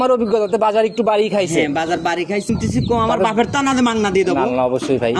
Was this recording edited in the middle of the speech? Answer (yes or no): yes